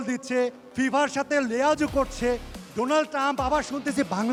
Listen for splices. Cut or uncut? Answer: uncut